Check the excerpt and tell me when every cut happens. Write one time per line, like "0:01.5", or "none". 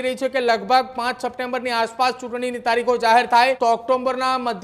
0:03.6